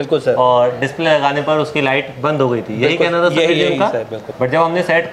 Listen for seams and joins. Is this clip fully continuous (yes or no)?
no